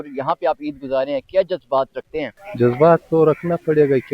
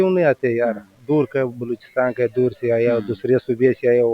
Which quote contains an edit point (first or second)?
first